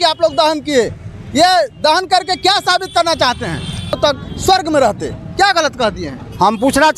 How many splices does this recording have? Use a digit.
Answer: 1